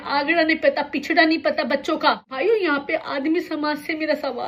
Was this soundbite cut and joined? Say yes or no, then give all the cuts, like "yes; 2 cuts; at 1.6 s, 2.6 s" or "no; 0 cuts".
yes; 1 cut; at 2.3 s